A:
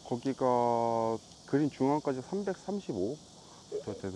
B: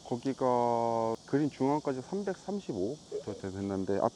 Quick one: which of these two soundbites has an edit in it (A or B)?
B